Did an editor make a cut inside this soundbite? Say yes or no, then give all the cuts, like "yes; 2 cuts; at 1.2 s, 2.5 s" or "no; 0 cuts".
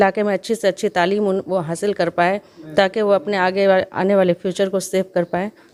no; 0 cuts